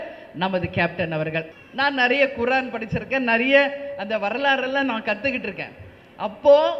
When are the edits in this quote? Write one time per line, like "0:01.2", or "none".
0:01.5